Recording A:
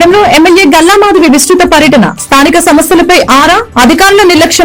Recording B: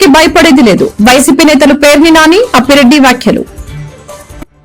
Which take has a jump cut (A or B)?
B